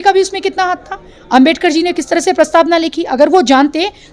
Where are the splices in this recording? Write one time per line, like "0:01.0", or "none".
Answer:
none